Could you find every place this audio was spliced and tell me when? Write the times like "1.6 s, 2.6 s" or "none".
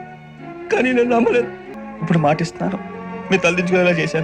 1.6 s